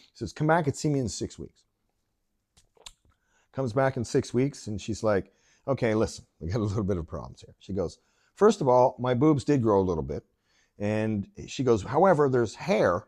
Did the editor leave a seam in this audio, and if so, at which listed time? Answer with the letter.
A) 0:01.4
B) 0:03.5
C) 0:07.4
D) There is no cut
D